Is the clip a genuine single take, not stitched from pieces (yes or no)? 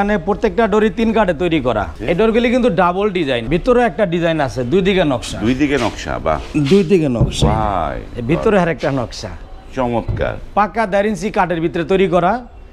no